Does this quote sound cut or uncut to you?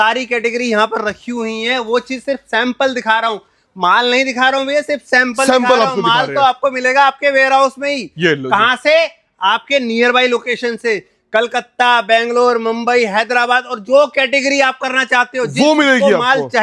uncut